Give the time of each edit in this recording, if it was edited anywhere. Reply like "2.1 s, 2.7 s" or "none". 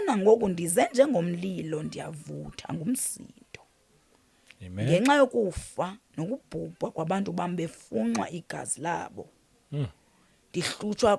none